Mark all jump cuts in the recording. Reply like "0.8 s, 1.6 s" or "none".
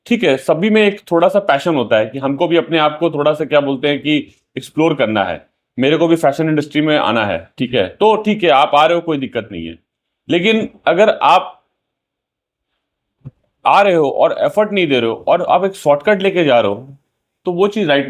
none